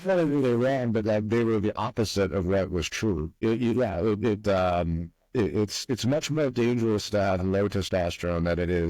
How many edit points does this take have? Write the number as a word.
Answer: one